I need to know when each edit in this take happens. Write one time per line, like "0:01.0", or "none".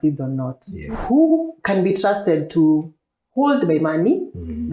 0:00.9